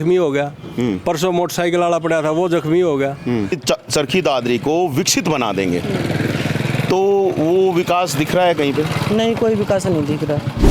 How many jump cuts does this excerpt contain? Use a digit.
1